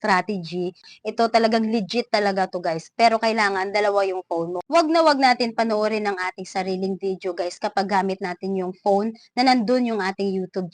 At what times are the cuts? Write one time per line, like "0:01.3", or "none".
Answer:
0:00.8
0:04.6